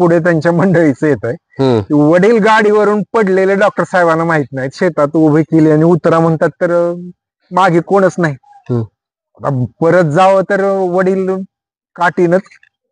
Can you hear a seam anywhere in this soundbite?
no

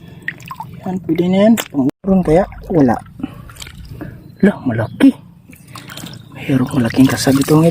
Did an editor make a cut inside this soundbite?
yes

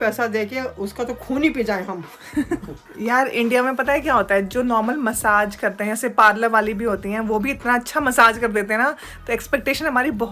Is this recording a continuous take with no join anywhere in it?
yes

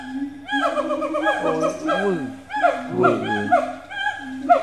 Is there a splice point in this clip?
no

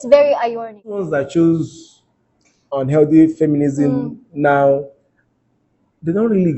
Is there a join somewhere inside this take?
yes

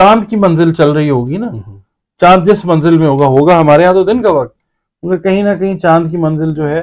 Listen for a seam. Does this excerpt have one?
no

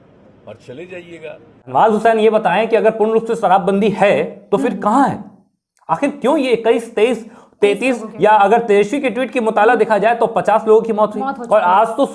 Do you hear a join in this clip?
yes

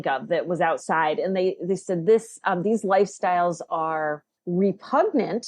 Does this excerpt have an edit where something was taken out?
yes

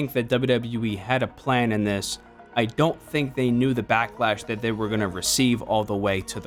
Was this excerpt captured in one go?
yes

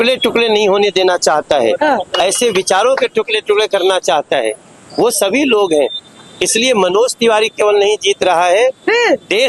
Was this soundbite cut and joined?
no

